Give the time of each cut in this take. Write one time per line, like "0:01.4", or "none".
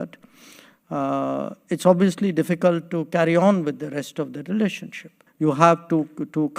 0:05.2